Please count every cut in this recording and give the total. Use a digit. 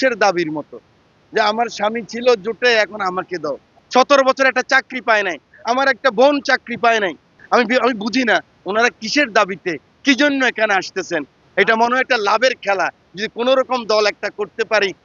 3